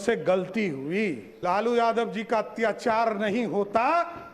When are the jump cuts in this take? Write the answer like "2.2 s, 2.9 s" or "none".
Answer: 1.3 s

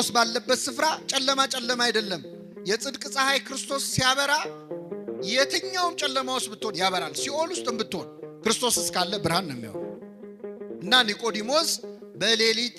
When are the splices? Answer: none

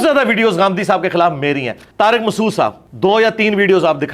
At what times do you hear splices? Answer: 1.8 s, 2.8 s

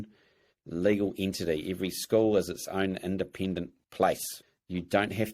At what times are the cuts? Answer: 3.8 s, 4.3 s

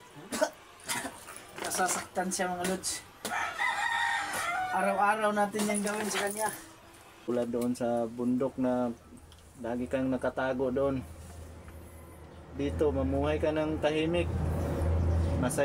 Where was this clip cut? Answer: 7.3 s

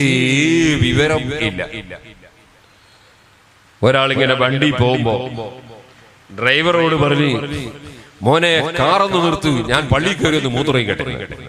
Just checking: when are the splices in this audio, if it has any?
none

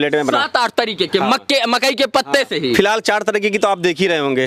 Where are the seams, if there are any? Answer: none

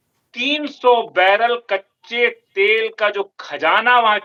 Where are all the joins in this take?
none

